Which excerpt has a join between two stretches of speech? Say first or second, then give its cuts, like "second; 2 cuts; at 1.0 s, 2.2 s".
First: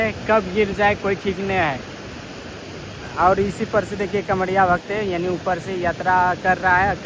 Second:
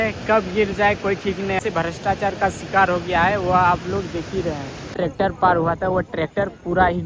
second; 2 cuts; at 1.6 s, 4.9 s